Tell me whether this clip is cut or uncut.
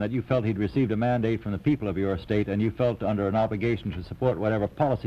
uncut